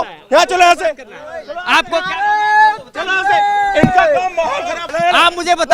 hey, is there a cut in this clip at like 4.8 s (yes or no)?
yes